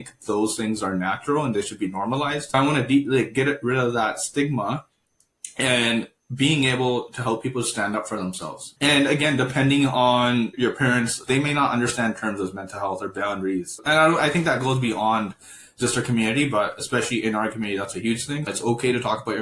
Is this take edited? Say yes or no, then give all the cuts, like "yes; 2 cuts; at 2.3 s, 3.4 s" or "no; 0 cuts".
yes; 5 cuts; at 2.5 s, 8.6 s, 11.2 s, 13.7 s, 18.5 s